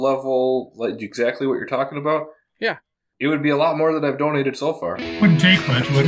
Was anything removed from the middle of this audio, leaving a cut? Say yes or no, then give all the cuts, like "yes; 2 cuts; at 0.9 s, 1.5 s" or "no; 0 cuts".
yes; 1 cut; at 5.2 s